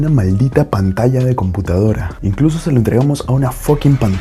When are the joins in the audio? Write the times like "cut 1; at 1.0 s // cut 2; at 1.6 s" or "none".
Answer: none

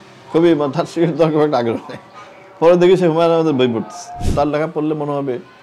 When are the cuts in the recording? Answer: cut 1; at 4.2 s

